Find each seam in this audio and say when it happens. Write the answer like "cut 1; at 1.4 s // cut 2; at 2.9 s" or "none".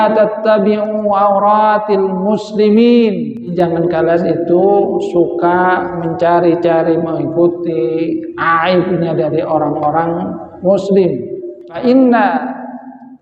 cut 1; at 3.5 s // cut 2; at 11.8 s